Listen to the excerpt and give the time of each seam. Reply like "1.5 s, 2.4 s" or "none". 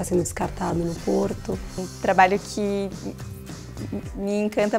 1.9 s